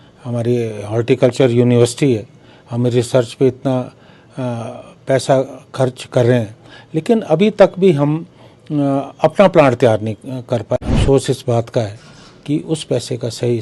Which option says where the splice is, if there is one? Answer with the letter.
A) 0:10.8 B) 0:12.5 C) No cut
A